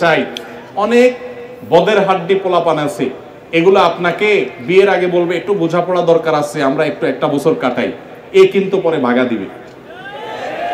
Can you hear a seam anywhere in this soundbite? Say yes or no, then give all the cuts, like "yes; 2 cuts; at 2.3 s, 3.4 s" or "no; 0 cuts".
no; 0 cuts